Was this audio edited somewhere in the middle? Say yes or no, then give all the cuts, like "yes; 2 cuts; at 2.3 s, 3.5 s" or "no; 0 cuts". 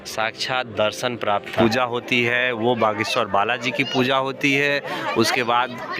yes; 1 cut; at 1.5 s